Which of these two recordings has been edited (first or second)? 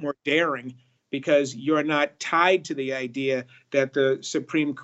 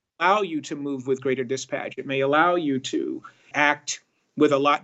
second